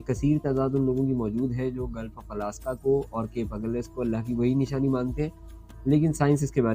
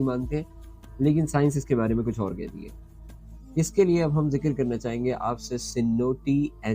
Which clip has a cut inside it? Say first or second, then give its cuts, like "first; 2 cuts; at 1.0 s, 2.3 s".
second; 1 cut; at 3.3 s